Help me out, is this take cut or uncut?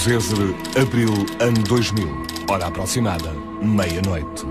uncut